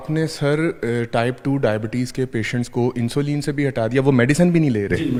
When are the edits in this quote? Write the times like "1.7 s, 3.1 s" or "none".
none